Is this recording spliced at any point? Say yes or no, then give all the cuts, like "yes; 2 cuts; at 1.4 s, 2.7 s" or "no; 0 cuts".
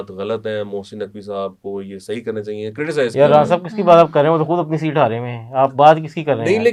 no; 0 cuts